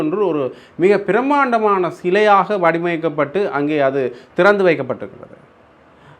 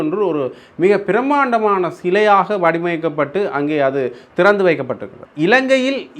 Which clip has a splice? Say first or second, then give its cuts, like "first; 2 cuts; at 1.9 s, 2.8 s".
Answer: second; 1 cut; at 5.2 s